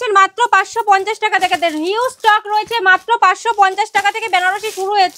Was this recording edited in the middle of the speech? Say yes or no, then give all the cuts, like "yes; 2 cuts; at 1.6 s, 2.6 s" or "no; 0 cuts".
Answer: no; 0 cuts